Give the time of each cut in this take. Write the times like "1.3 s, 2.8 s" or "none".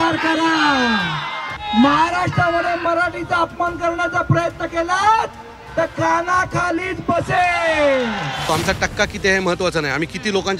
1.7 s, 8.5 s